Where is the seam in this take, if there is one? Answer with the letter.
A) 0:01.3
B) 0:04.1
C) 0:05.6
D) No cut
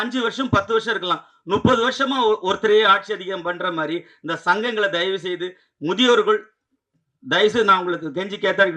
D